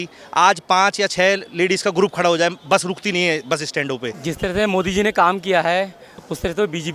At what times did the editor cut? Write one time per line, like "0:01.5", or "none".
0:04.2

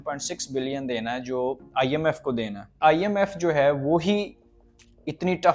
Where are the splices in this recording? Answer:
0:02.8

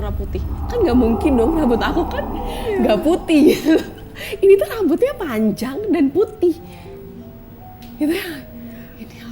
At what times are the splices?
none

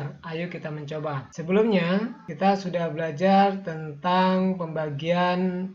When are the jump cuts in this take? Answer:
0:01.3
0:02.2

